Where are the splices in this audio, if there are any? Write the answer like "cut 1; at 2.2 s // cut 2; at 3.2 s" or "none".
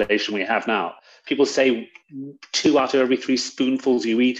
none